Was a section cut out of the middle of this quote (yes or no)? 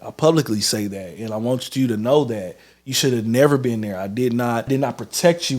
yes